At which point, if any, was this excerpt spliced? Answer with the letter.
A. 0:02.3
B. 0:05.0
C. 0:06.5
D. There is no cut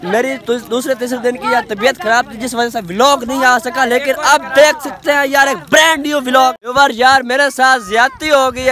C